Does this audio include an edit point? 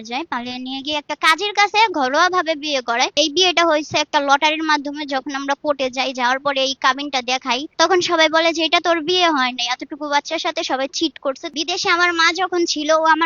yes; 3 cuts; at 3.2 s, 7.7 s, 11.5 s

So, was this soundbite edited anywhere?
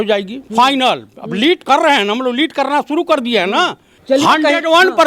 yes; 1 cut; at 3.9 s

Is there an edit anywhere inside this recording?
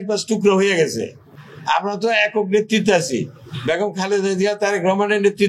no; 0 cuts

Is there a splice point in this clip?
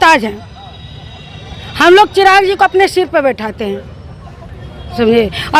no; 0 cuts

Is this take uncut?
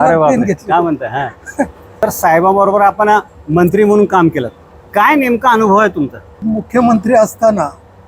no; 2 cuts; at 2.0 s, 6.4 s

